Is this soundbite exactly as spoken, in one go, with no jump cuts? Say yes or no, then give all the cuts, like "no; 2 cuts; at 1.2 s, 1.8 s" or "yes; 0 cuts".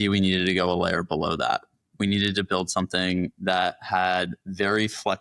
yes; 0 cuts